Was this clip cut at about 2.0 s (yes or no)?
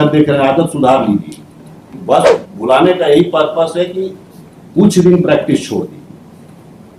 yes